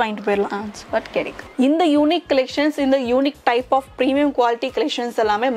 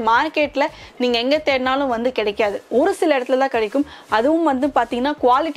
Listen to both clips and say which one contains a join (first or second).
first